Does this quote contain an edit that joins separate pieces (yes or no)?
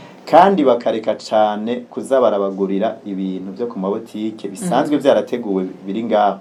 no